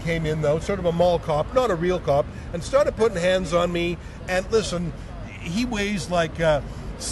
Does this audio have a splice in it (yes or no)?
no